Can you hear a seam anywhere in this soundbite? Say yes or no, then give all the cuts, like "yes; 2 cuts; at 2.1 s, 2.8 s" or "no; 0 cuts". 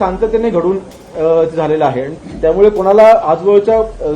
yes; 1 cut; at 2.1 s